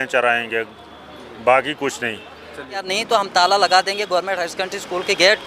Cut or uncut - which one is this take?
cut